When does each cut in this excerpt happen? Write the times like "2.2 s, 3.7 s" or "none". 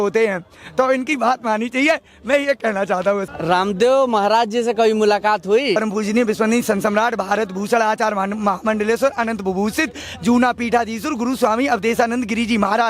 3.3 s, 5.8 s